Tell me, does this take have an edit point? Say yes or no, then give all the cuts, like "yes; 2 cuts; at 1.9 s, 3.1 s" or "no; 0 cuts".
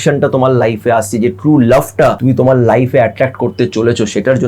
yes; 1 cut; at 2.2 s